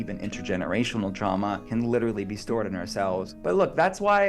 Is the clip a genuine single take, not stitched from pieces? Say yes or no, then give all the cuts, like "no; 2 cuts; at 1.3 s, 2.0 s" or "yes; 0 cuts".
no; 2 cuts; at 1.6 s, 3.3 s